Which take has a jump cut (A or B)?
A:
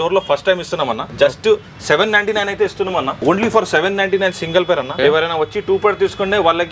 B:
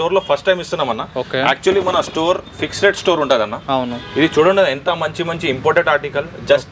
A